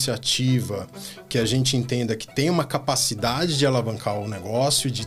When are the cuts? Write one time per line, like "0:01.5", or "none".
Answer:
none

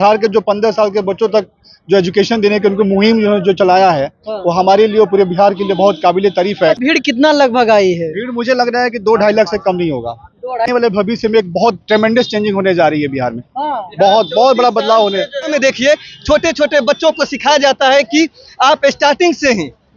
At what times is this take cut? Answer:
0:06.8
0:10.7
0:15.5

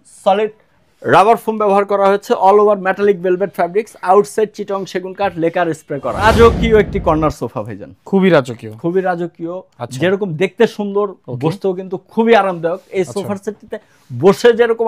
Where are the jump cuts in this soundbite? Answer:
0:06.2

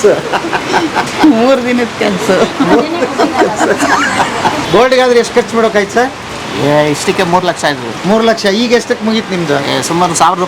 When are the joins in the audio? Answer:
0:04.6

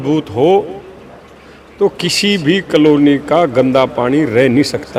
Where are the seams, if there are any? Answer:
none

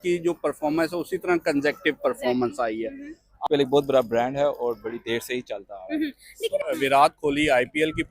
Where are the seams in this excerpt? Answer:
0:03.4
0:06.6

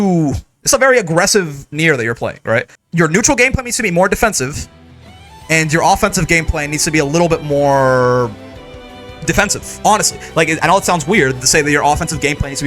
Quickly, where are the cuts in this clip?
0:02.8

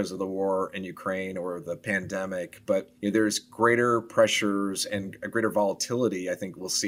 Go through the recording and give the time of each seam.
0:02.9

